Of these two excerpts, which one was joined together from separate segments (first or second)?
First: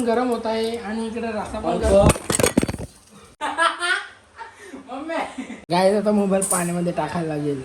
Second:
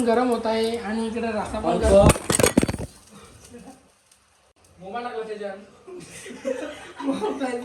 first